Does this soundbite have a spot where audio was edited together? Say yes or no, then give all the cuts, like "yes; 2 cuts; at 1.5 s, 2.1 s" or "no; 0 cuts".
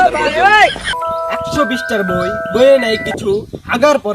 yes; 1 cut; at 0.9 s